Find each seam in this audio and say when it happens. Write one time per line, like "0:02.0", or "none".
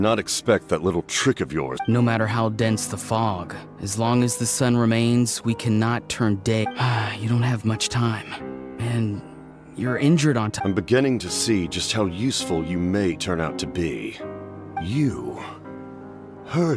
0:01.8
0:06.6
0:10.5
0:14.2